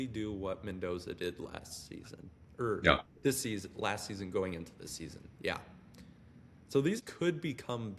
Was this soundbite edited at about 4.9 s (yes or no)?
no